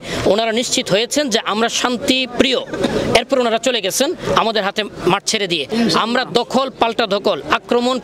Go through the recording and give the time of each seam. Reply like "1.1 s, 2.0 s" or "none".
5.7 s